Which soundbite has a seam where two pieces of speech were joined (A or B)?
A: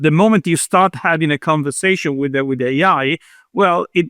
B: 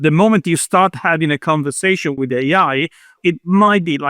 B